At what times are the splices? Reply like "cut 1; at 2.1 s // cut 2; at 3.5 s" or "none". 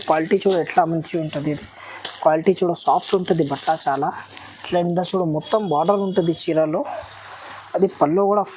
none